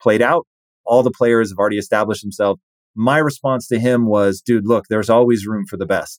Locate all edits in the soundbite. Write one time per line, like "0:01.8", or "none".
0:02.7